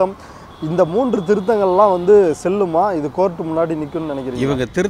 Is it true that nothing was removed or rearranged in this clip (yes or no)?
yes